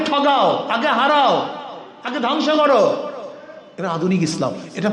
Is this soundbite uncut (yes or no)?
yes